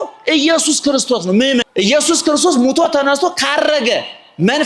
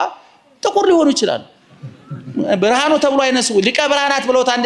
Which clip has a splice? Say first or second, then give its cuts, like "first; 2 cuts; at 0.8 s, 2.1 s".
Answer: first; 1 cut; at 1.7 s